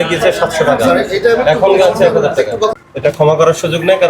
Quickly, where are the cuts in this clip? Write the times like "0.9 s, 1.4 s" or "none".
2.7 s